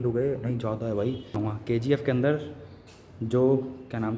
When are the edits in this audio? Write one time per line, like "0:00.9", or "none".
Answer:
0:01.3